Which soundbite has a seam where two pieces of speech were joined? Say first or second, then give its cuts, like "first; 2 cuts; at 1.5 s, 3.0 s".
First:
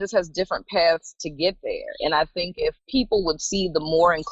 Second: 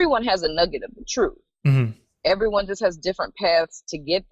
first; 1 cut; at 2.8 s